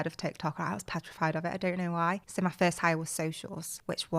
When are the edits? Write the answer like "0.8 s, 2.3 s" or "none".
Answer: none

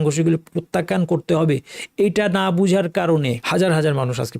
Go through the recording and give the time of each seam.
3.4 s

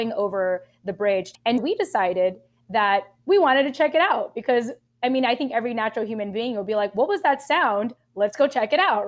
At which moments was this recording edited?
none

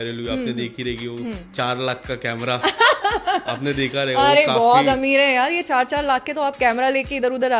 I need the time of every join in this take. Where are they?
none

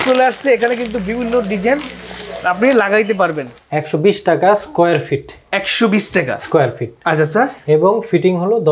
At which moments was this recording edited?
3.5 s

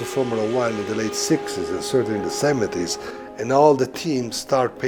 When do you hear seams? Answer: none

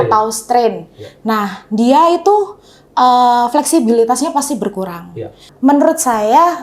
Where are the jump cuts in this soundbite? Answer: 5.4 s

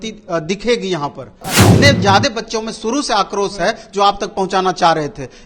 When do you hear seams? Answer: 1.5 s

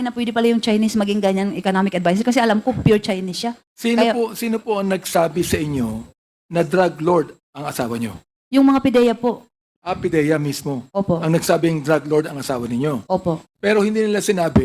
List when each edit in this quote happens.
none

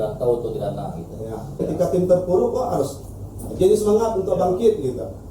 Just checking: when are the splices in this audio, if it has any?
1.6 s

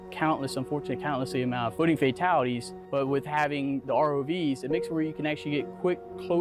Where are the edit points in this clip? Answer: 1.7 s, 2.8 s

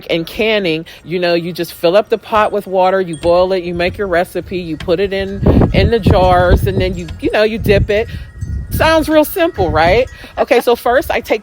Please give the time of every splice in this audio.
0.9 s

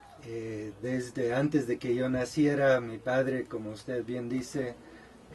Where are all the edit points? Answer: 4.3 s

